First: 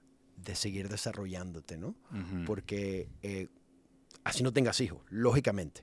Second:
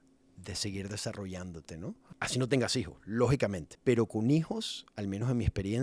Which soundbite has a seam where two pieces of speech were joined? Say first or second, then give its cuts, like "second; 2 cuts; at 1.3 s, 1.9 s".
second; 2 cuts; at 2.0 s, 3.7 s